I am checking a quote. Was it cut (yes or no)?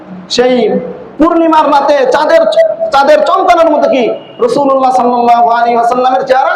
yes